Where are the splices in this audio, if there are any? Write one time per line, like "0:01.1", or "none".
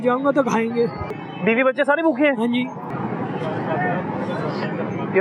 0:01.2
0:02.9